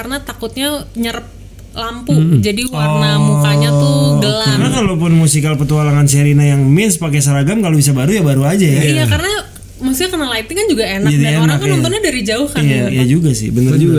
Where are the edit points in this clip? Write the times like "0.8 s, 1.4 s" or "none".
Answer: 4.7 s, 12.9 s